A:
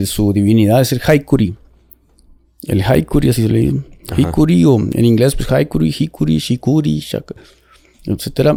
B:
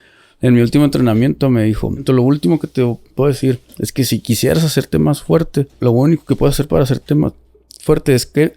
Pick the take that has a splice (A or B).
B